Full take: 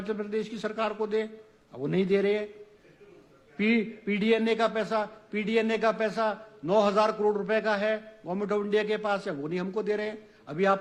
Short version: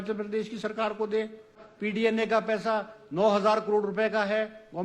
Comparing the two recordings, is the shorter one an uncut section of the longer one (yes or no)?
no